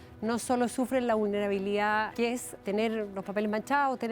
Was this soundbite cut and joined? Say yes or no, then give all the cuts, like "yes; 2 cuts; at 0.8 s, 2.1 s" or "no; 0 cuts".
yes; 1 cut; at 2.5 s